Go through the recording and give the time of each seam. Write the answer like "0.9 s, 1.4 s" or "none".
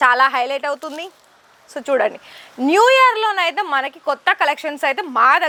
none